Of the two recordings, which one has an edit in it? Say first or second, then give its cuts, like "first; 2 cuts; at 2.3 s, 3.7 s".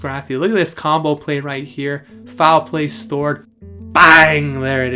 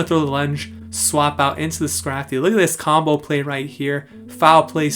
second; 1 cut; at 0.9 s